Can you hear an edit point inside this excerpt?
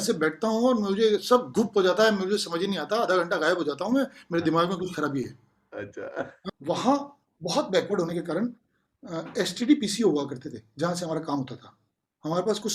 yes; 1 cut; at 6.5 s

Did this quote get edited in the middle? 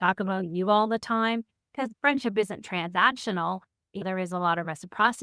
no; 0 cuts

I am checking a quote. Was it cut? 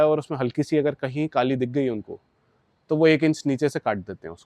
no; 0 cuts

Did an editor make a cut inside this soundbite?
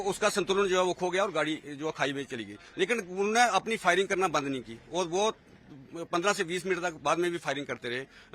no; 0 cuts

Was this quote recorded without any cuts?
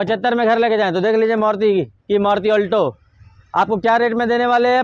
yes; 0 cuts

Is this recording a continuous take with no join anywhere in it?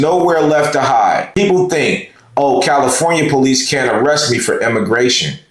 no; 1 cut; at 1.3 s

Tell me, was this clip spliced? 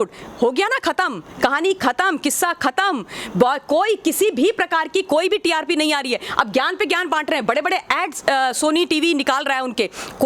no; 0 cuts

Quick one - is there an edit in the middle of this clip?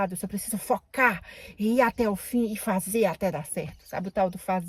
no; 0 cuts

